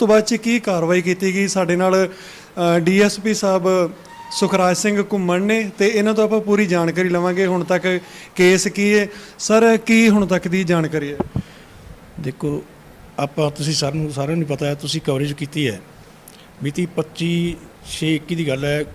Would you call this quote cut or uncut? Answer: uncut